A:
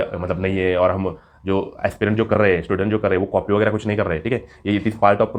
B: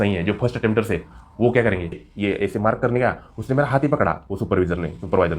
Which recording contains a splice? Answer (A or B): B